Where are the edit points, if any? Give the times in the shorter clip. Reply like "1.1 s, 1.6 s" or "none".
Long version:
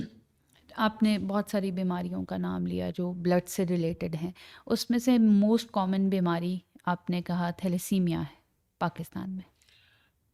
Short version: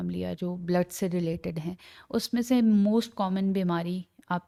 none